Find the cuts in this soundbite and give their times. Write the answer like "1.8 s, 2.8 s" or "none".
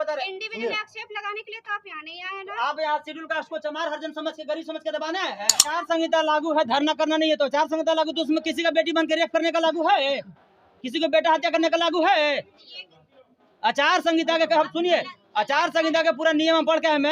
5.7 s